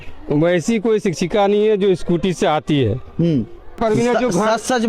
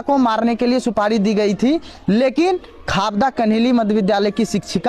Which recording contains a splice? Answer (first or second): first